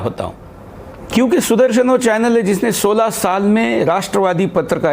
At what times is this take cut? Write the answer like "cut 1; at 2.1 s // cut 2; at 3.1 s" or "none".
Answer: cut 1; at 0.9 s